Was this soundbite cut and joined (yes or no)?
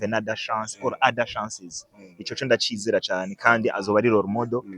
no